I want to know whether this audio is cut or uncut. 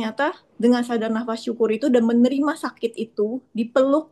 uncut